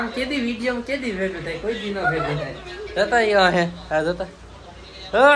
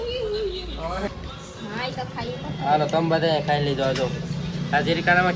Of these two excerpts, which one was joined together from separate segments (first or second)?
second